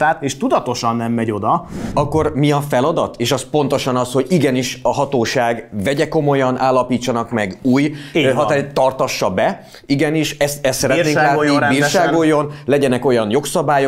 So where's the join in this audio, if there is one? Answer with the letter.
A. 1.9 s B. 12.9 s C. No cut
A